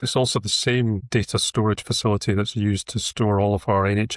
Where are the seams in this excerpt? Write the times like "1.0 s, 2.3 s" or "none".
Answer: 1.0 s